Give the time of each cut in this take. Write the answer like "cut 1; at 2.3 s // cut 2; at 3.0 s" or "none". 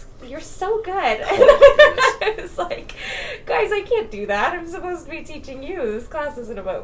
none